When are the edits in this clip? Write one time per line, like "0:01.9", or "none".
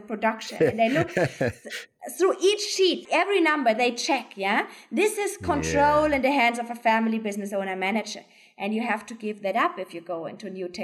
0:03.0